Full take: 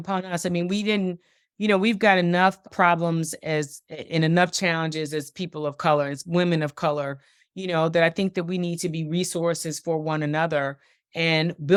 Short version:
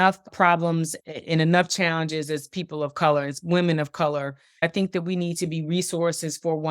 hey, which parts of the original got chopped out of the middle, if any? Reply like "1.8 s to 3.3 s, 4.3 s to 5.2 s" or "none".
3.4 s to 3.8 s, 7.5 s to 8.1 s